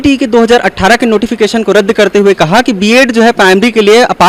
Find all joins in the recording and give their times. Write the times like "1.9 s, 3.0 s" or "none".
none